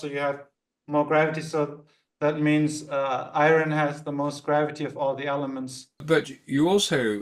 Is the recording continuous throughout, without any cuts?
no; 1 cut; at 6.0 s

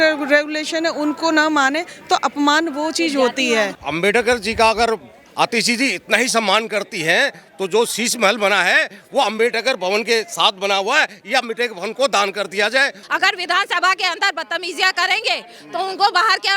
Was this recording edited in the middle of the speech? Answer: yes; 2 cuts; at 3.8 s, 13.0 s

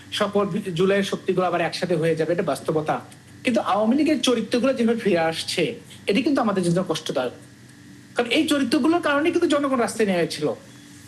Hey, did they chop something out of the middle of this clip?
no; 0 cuts

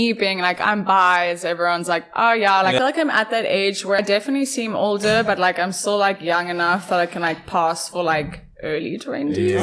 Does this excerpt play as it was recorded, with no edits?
no; 2 cuts; at 2.8 s, 4.0 s

